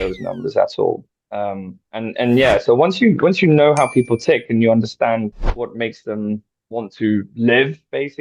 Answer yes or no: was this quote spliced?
no